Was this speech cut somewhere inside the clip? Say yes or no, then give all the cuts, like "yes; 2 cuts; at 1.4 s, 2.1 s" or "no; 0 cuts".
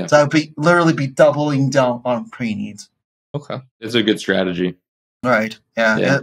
no; 0 cuts